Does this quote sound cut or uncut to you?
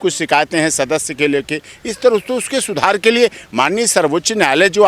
uncut